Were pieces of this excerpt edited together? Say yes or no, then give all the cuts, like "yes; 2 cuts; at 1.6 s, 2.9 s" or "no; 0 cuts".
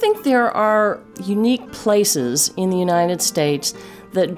yes; 1 cut; at 1.0 s